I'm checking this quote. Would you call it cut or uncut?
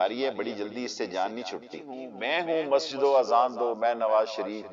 cut